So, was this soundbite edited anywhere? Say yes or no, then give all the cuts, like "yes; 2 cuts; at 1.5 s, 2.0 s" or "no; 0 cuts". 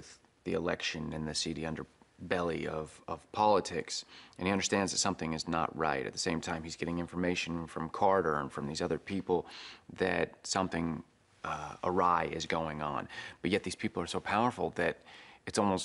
yes; 1 cut; at 4.0 s